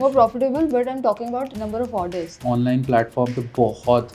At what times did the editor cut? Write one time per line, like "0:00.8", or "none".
0:01.5
0:02.4